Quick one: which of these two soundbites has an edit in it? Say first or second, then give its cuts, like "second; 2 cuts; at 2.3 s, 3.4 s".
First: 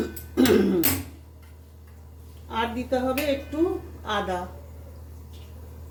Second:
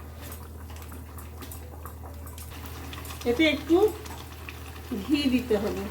second; 1 cut; at 2.5 s